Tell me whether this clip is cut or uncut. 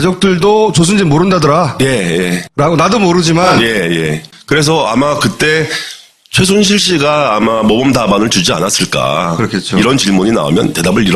cut